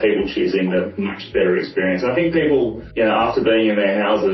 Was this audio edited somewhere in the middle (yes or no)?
yes